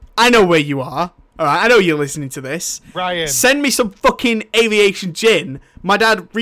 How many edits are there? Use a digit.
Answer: 0